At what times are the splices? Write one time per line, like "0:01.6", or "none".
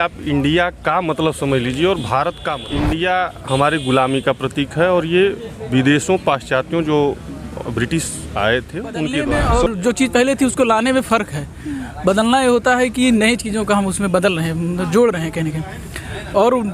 0:02.6
0:09.2